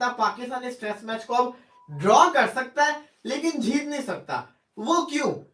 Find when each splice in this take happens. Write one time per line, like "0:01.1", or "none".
none

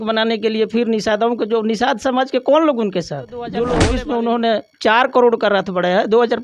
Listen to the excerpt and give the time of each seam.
0:03.8

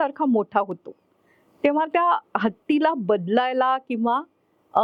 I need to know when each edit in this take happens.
none

